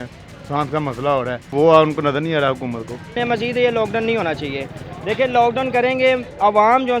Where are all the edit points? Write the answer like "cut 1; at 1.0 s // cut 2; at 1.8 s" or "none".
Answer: cut 1; at 1.4 s // cut 2; at 3.1 s